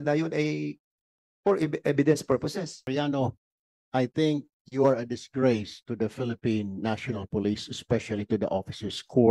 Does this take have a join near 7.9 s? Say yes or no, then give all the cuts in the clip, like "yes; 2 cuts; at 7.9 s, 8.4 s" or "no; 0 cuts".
no; 1 cut; at 2.9 s